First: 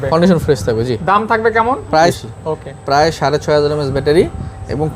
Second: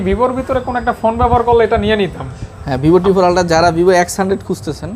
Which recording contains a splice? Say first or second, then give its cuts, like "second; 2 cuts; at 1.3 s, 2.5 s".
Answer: first; 1 cut; at 2.2 s